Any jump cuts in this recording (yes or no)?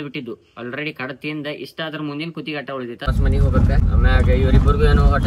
yes